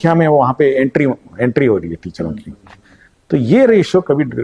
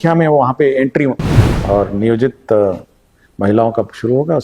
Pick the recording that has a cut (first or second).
second